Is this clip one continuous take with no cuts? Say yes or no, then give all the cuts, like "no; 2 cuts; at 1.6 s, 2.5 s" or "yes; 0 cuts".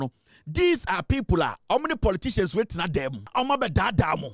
no; 1 cut; at 3.3 s